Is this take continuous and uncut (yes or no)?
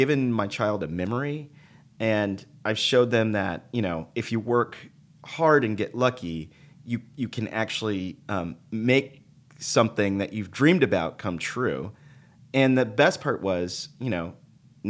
yes